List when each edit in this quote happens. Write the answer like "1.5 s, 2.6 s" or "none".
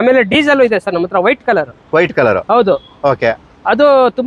none

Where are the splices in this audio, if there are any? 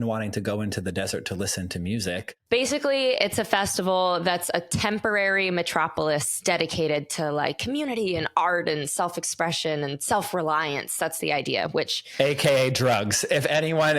2.3 s

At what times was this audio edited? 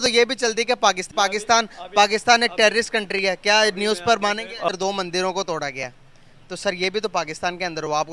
4.7 s, 6.9 s

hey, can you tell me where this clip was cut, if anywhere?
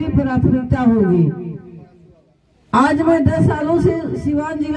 none

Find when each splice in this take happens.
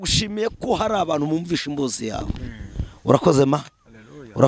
none

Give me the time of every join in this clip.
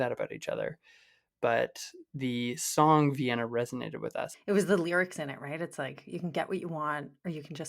4.2 s

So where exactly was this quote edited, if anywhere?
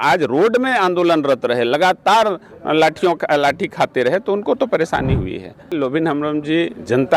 5.7 s

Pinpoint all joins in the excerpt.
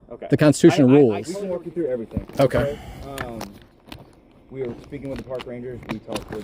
1.5 s

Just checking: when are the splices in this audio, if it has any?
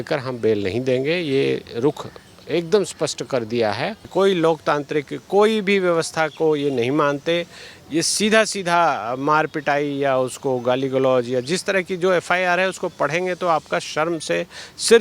4.1 s

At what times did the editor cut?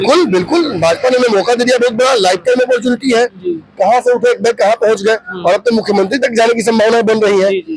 none

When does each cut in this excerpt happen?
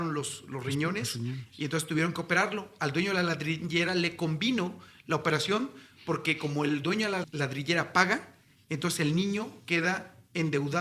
7.3 s

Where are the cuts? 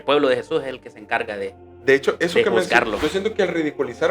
2.9 s

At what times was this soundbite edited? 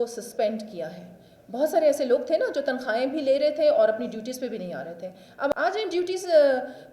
5.5 s

